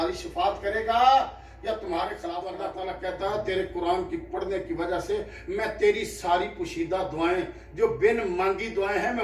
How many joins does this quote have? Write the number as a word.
one